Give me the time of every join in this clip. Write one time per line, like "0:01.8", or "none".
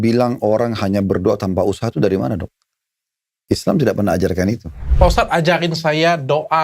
0:04.8